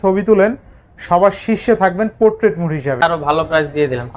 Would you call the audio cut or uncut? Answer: cut